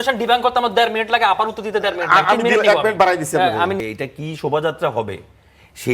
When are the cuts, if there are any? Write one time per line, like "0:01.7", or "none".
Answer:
0:03.8